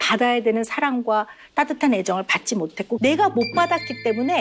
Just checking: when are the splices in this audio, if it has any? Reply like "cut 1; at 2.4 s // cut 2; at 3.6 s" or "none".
cut 1; at 2.9 s